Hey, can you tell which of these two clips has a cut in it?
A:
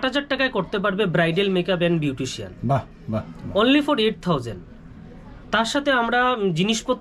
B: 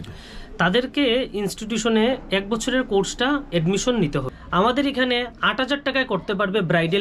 B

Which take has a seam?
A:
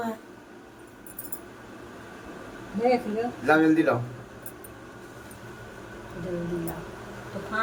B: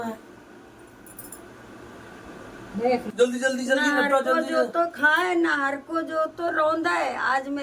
B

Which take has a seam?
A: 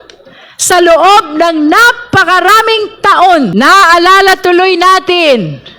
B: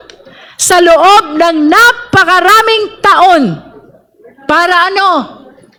A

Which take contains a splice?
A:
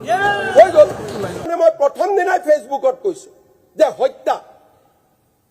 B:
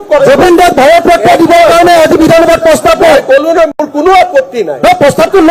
A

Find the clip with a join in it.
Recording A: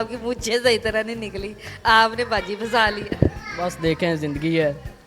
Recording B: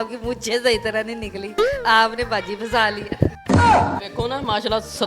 B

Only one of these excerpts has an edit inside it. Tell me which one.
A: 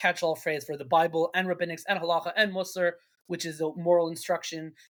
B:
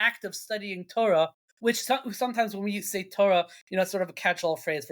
B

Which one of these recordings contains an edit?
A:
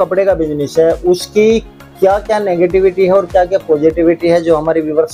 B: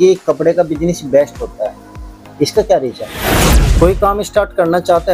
B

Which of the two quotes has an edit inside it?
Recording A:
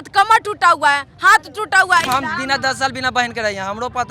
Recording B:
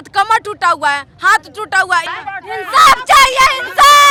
A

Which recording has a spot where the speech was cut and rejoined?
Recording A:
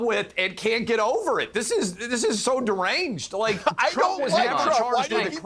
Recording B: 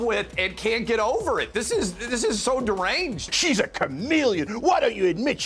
B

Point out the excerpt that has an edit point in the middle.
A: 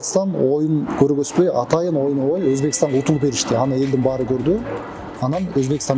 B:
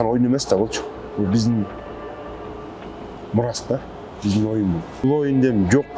B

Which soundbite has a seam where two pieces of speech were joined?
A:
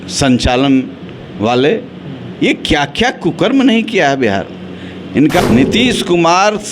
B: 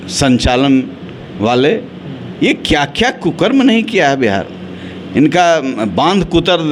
A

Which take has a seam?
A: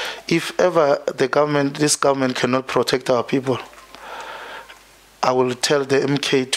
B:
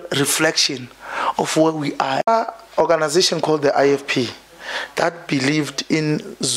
B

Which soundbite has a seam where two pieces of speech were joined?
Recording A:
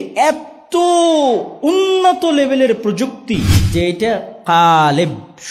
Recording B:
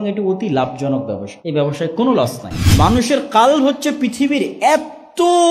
B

